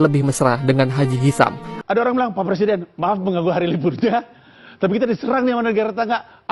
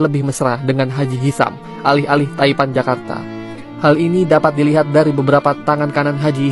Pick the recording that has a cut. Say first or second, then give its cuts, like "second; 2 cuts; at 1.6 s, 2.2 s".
first; 1 cut; at 1.7 s